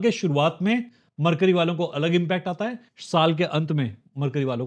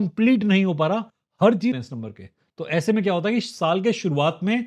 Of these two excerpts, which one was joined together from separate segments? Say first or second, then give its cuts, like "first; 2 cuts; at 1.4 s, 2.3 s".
second; 1 cut; at 1.8 s